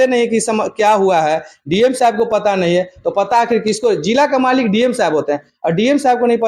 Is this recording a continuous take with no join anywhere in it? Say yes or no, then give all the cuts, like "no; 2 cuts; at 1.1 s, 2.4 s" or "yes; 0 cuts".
yes; 0 cuts